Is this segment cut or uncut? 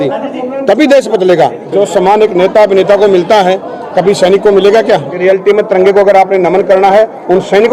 cut